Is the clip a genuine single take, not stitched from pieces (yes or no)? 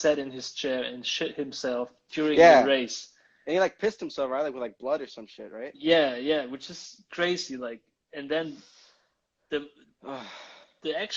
yes